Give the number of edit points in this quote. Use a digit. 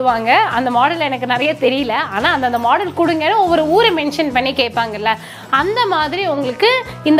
0